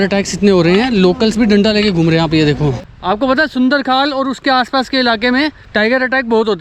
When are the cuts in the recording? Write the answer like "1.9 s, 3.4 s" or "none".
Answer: 2.9 s, 5.6 s